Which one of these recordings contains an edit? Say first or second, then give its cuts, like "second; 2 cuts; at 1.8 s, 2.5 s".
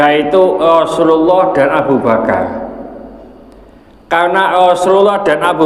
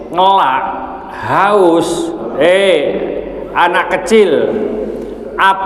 second; 1 cut; at 2.3 s